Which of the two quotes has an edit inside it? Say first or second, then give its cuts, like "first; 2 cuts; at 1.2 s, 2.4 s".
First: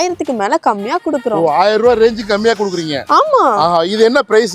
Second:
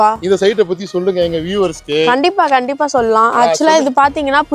second; 1 cut; at 3.3 s